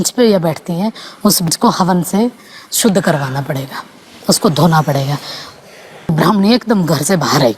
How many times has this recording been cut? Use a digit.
2